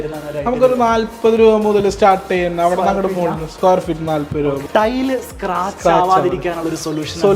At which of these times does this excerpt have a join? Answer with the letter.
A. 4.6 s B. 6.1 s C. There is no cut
A